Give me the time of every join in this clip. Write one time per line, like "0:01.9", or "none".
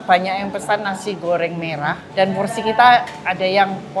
0:02.0